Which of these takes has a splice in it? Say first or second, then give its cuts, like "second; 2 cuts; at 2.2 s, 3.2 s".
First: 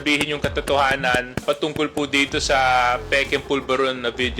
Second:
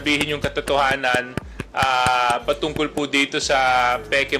first; 1 cut; at 1.4 s